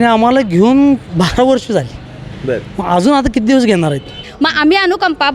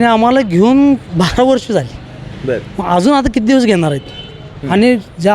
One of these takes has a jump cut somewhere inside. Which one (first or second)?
first